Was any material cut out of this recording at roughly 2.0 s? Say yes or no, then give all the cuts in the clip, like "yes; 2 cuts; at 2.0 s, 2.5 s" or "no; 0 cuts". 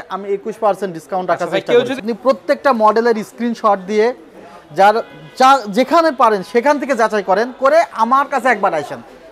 yes; 1 cut; at 2.0 s